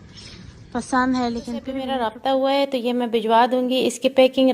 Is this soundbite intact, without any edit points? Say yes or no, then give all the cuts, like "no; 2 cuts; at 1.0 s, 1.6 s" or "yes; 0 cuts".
no; 1 cut; at 1.9 s